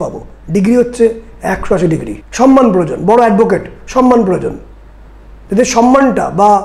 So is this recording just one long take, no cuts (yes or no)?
no